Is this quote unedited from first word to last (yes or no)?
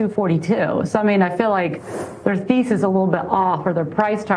yes